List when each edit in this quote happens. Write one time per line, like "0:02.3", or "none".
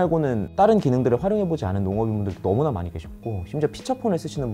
none